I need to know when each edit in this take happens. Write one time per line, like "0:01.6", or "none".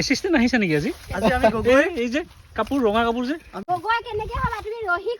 0:03.6